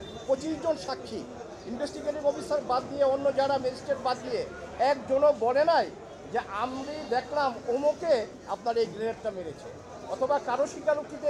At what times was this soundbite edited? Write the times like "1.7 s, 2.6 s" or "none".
none